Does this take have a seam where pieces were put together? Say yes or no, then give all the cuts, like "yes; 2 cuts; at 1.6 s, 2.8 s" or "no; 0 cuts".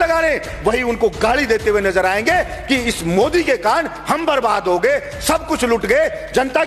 no; 0 cuts